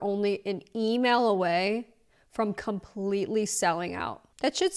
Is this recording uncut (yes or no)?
yes